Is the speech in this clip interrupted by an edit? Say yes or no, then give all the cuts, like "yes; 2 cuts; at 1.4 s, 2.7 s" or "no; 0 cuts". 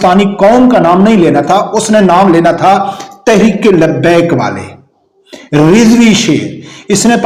no; 0 cuts